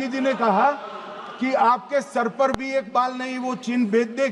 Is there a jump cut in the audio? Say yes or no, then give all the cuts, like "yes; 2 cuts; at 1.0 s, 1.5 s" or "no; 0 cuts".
no; 0 cuts